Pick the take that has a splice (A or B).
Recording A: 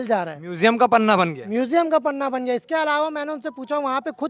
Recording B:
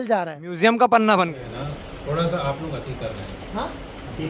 B